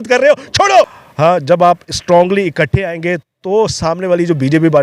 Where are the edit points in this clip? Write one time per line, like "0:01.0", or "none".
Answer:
0:00.9